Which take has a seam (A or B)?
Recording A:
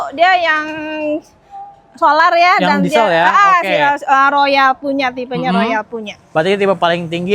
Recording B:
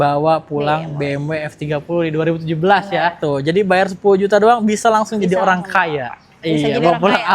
B